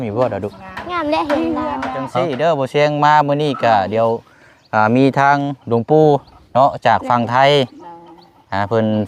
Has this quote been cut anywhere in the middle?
yes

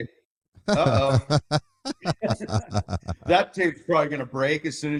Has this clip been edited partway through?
no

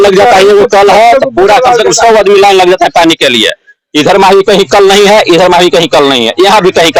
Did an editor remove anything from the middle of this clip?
no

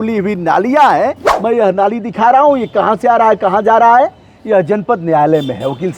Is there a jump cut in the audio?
yes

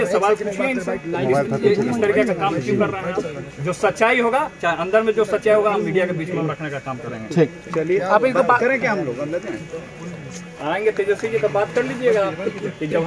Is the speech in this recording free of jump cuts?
yes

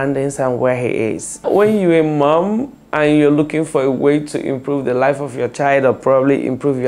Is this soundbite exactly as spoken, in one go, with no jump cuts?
no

